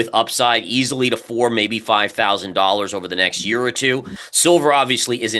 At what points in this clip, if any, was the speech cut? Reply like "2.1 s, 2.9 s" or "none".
4.2 s